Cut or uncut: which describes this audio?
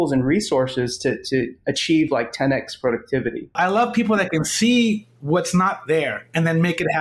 cut